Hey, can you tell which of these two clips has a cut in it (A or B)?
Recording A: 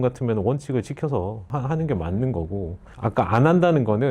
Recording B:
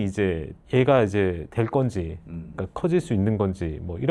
A